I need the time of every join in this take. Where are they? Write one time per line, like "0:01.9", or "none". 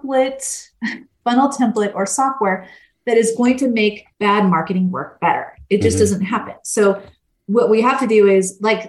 0:04.1